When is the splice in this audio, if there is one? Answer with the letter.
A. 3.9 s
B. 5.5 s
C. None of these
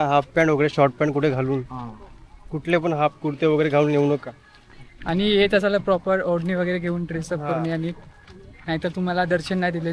C